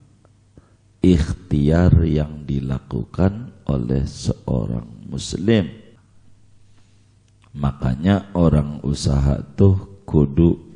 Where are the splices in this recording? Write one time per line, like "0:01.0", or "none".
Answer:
0:06.0